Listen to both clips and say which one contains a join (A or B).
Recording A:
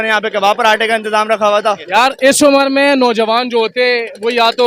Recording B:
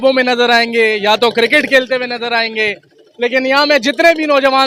A